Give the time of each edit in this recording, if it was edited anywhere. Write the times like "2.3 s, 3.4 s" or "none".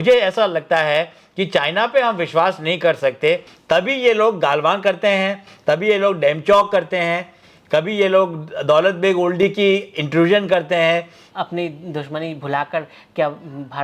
3.5 s, 11.2 s